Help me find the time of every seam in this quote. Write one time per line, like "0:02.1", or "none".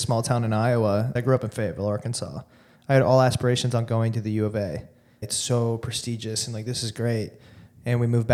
0:01.1
0:05.2